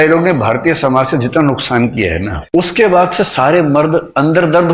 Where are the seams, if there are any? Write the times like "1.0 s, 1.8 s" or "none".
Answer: 2.3 s